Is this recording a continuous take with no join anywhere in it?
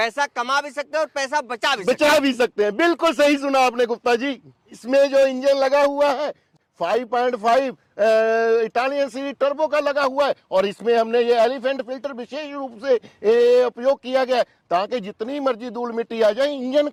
yes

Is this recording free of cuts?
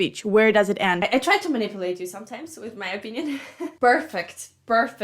no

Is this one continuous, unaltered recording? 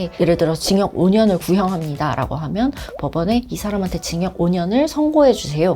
yes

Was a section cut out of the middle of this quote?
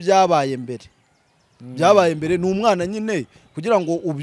no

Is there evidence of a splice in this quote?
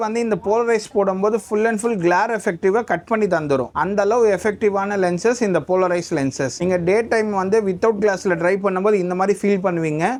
no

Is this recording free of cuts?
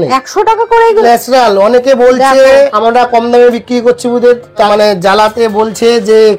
no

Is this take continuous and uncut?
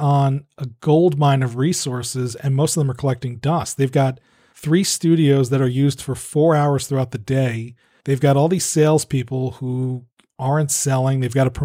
yes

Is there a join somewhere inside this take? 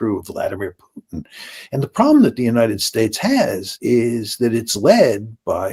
no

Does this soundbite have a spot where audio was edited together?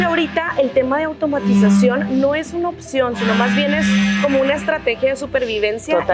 no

